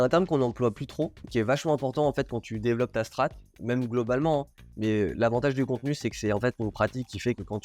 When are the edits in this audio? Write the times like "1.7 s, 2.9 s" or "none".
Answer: 1.2 s, 4.7 s